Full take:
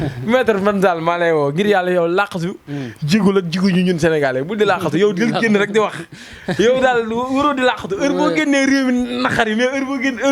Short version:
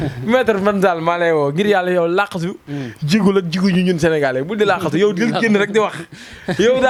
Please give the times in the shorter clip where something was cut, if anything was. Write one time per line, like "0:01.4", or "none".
none